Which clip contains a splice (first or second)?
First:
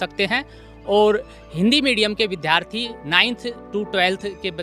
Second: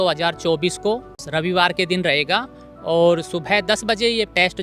second